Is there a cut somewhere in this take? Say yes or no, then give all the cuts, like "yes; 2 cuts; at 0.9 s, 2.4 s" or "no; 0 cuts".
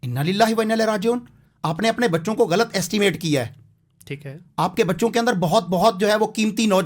no; 0 cuts